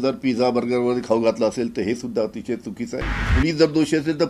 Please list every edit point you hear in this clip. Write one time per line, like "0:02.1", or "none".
0:03.3